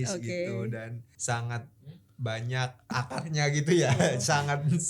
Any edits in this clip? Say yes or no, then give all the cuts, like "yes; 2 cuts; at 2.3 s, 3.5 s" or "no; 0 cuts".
yes; 2 cuts; at 1.1 s, 2.9 s